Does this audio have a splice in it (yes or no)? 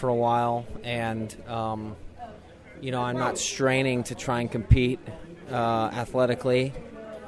no